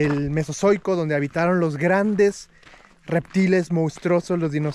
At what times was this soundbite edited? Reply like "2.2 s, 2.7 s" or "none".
none